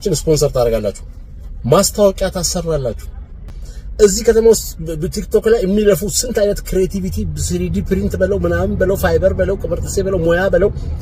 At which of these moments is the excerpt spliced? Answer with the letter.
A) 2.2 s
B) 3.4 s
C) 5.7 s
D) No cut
D